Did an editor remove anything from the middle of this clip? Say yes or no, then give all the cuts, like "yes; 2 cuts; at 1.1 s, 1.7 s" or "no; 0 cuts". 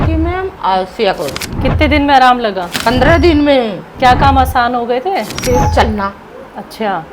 yes; 4 cuts; at 1.4 s, 2.7 s, 3.8 s, 5.3 s